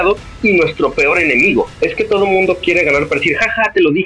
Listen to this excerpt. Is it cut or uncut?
cut